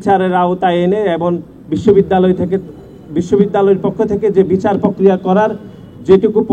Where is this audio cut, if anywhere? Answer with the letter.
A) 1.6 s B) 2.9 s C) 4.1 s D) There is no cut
D